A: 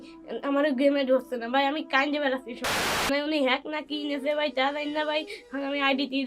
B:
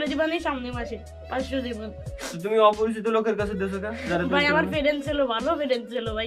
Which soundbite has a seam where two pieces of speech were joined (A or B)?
A